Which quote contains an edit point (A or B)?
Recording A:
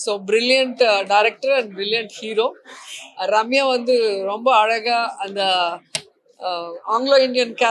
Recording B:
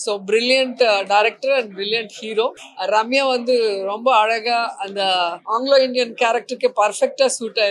B